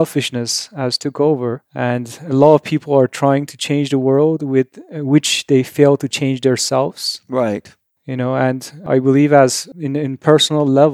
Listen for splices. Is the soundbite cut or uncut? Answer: cut